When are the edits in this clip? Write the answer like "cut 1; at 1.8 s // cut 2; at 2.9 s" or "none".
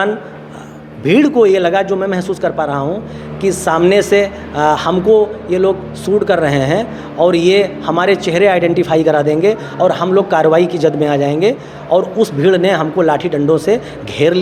none